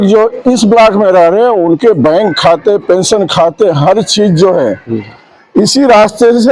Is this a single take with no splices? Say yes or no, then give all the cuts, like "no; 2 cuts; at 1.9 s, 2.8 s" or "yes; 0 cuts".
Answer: yes; 0 cuts